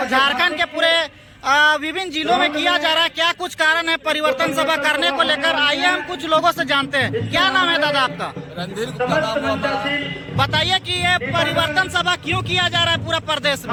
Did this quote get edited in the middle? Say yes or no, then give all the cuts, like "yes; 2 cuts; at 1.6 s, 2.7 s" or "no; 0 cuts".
no; 0 cuts